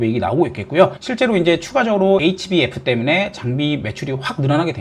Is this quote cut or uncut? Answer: uncut